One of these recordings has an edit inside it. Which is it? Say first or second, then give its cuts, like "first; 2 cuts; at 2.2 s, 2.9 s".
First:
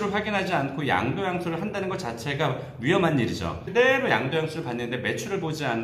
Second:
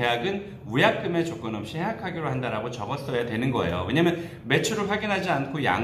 first; 1 cut; at 3.6 s